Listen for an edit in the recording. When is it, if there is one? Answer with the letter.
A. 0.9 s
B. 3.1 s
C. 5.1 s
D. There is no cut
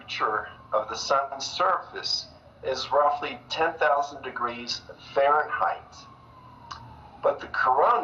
B